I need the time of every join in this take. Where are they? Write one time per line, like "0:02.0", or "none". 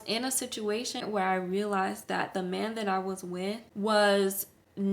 0:01.0
0:03.7